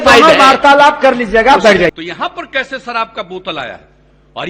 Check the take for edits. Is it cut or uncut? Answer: cut